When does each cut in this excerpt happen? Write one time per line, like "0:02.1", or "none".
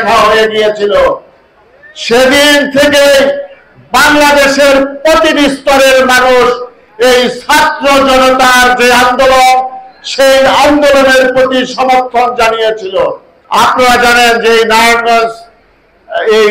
0:13.3